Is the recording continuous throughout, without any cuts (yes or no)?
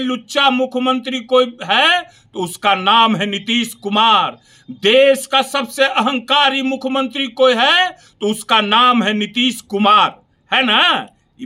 yes